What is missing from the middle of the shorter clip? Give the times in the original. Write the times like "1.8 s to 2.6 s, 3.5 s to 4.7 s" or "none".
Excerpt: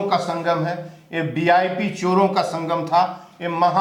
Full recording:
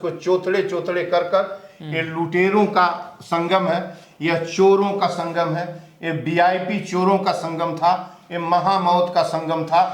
none